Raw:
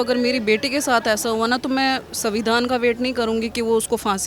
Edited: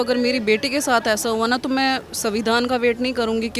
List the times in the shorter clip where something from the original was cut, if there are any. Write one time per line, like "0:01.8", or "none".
none